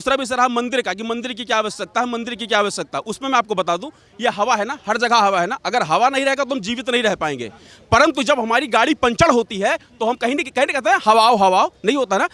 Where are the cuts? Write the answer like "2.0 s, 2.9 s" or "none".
none